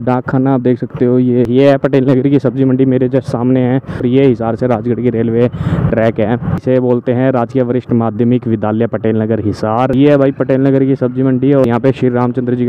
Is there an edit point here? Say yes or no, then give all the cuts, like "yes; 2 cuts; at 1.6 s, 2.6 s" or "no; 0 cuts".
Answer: yes; 5 cuts; at 1.5 s, 4.0 s, 6.6 s, 9.9 s, 11.6 s